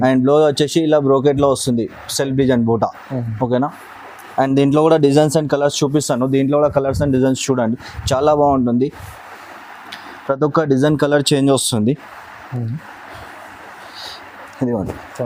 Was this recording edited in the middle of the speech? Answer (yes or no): no